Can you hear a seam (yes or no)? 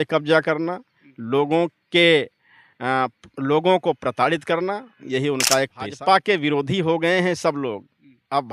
yes